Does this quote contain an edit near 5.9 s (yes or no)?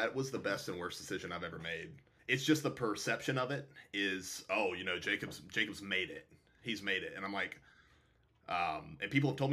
no